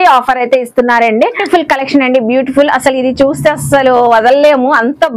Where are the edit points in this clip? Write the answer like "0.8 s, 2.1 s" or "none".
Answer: 1.4 s